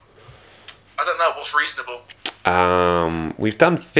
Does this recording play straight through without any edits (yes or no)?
yes